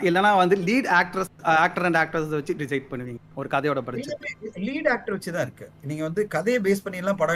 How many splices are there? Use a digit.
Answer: 0